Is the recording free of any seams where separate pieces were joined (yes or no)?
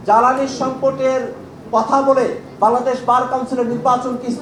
yes